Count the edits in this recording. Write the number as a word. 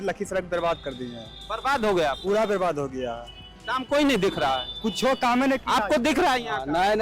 zero